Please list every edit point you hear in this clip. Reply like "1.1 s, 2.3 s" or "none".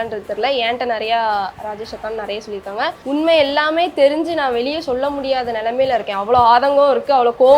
3.0 s